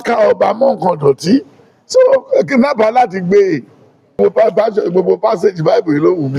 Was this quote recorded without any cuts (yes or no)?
no